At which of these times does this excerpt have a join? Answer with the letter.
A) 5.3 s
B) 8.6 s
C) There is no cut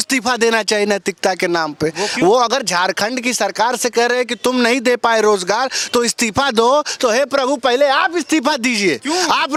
C